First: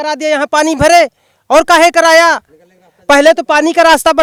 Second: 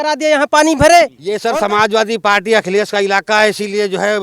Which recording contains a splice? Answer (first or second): second